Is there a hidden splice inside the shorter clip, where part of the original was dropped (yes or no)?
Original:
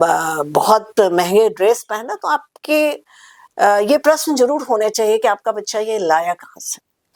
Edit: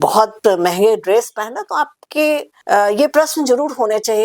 yes